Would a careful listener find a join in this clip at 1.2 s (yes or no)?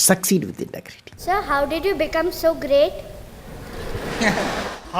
yes